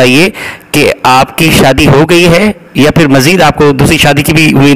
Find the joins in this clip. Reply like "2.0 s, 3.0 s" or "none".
none